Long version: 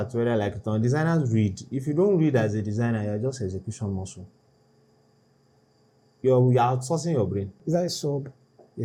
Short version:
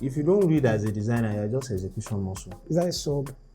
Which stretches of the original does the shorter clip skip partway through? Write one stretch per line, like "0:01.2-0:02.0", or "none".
0:04.3-0:07.5